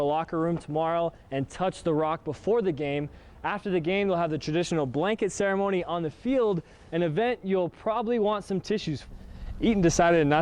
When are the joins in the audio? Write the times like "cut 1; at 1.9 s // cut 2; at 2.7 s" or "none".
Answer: cut 1; at 9.0 s